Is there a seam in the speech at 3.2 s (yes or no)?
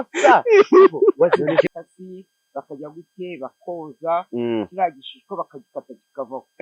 no